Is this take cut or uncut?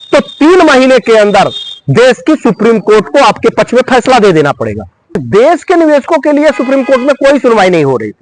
cut